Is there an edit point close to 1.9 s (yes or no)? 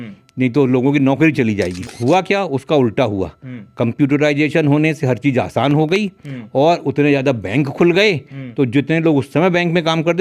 yes